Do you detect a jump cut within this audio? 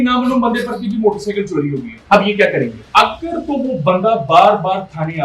yes; 2 cuts; at 1.9 s, 2.8 s

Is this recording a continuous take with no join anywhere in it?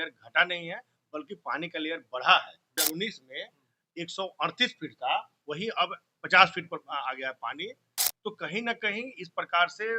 no; 1 cut; at 2.8 s

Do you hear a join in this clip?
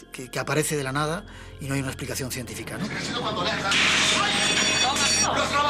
yes; 1 cut; at 2.9 s

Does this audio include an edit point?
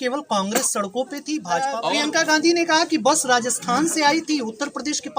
yes; 1 cut; at 1.7 s

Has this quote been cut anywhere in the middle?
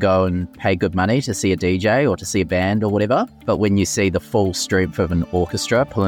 no; 0 cuts

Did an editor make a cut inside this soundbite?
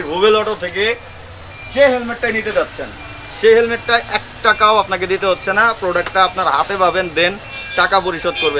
no; 0 cuts

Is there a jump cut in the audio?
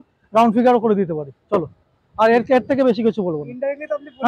no; 0 cuts

